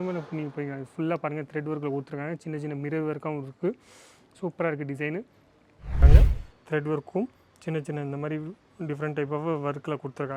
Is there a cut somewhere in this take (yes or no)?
yes